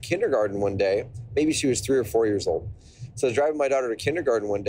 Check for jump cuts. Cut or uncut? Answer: uncut